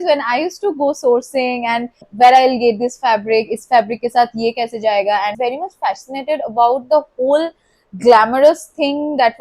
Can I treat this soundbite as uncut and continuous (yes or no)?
no